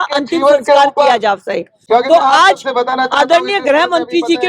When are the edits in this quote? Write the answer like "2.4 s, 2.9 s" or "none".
1.7 s